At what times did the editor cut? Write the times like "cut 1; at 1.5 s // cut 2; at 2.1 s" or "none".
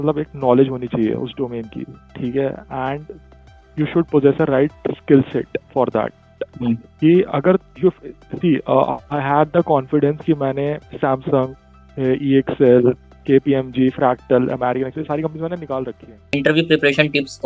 cut 1; at 16.3 s